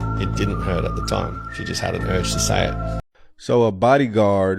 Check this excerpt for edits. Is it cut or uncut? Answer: cut